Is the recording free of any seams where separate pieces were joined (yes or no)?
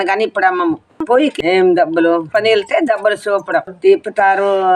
no